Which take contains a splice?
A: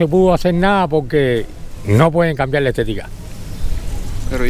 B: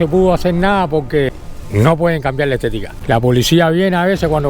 B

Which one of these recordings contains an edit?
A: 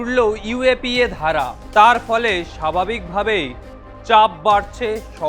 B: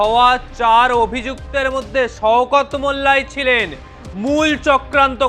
A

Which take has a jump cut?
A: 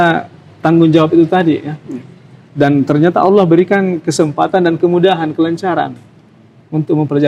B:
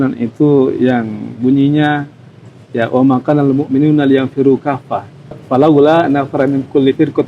B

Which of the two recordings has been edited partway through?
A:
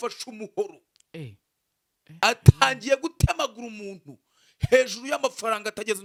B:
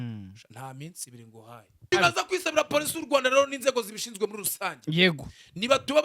B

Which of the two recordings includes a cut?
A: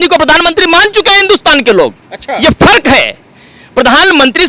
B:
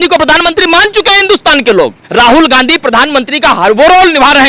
B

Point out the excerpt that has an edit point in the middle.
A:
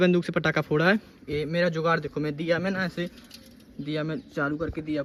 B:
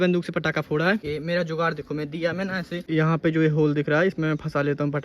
B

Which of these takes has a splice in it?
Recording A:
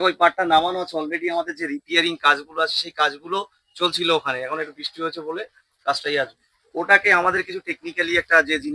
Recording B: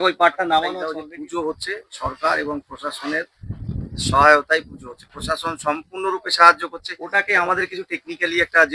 B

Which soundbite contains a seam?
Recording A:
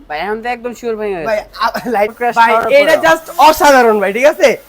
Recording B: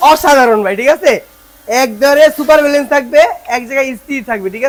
A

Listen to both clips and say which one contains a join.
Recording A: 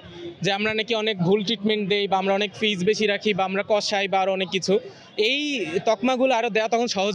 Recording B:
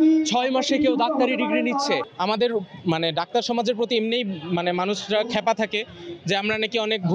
B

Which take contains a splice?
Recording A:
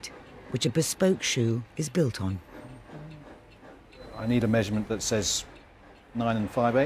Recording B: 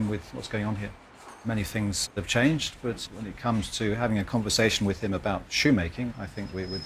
B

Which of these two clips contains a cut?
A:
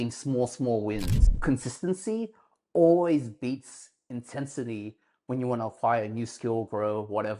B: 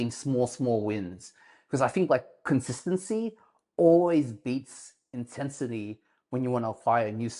A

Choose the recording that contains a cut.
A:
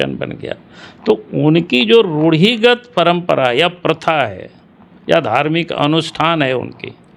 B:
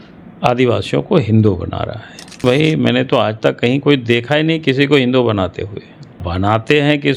B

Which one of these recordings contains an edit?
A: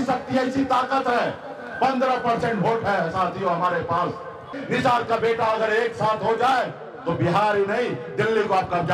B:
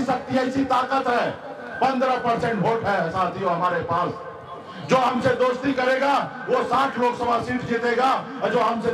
A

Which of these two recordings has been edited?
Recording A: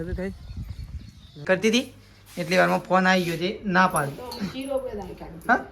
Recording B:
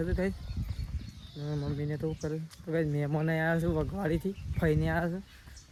A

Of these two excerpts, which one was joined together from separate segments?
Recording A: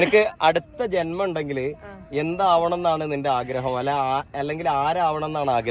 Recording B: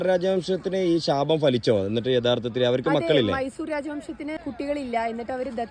B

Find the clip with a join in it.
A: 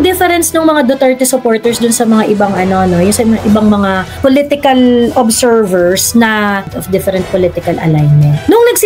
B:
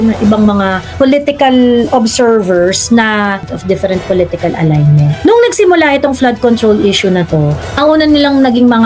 B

